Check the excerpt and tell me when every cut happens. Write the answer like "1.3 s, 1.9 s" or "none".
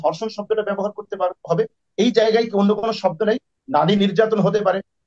none